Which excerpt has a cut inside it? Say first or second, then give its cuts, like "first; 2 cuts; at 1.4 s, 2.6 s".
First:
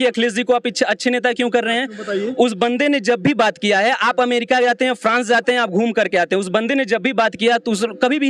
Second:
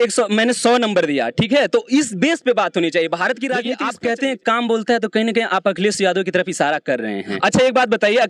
second; 2 cuts; at 3.7 s, 7.3 s